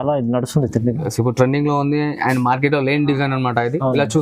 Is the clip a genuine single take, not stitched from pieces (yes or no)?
yes